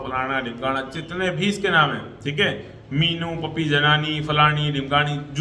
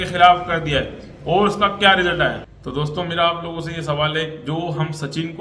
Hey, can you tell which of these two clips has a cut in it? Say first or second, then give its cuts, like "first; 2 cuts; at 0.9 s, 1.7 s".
second; 1 cut; at 2.5 s